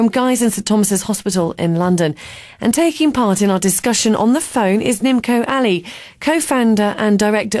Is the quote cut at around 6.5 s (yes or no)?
yes